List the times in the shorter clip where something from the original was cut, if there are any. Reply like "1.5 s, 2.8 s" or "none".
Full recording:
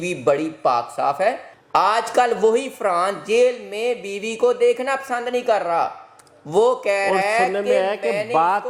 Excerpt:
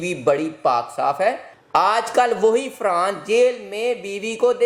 none